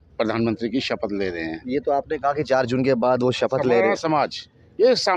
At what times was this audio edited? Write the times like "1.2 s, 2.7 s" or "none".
none